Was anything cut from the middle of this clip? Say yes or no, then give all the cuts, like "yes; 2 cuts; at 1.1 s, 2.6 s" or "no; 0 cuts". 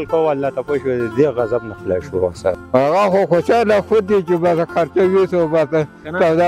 yes; 1 cut; at 2.6 s